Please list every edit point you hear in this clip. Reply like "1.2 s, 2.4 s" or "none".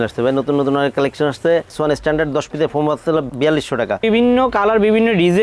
1.7 s, 4.0 s